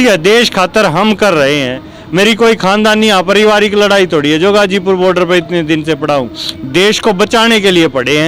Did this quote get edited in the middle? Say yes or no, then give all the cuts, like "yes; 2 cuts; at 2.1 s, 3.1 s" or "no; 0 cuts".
no; 0 cuts